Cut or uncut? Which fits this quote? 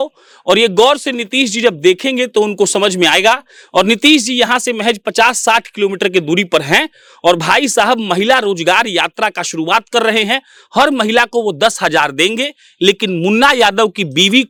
uncut